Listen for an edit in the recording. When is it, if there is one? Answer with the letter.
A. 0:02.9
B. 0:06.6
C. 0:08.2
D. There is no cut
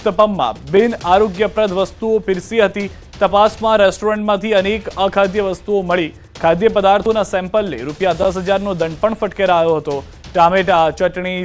D